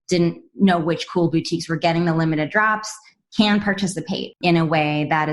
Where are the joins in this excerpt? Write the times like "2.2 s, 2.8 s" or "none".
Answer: 4.2 s